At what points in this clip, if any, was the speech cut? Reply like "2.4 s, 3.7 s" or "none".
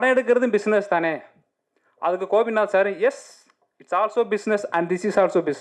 none